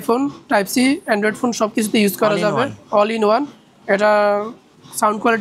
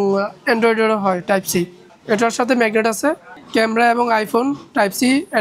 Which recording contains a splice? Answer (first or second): second